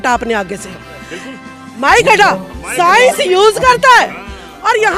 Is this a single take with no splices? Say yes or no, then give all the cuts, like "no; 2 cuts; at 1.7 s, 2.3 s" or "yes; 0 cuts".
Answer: yes; 0 cuts